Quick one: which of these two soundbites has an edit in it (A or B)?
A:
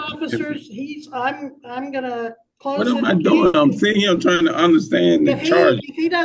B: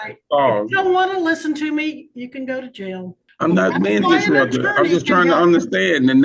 B